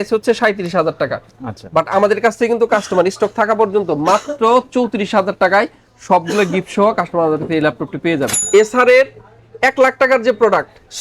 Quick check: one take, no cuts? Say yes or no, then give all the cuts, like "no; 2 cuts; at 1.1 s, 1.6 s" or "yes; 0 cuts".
no; 1 cut; at 8.3 s